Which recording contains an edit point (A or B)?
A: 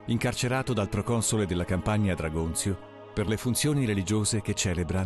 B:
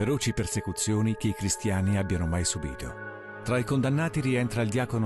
B